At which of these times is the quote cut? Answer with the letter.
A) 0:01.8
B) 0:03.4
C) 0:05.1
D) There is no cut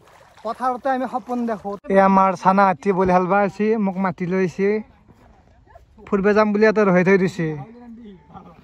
A